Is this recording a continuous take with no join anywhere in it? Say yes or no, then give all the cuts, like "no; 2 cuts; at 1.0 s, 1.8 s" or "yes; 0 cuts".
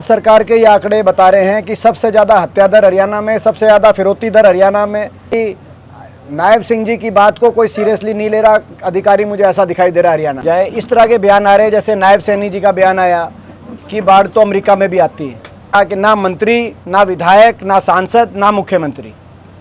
no; 3 cuts; at 5.3 s, 10.4 s, 15.7 s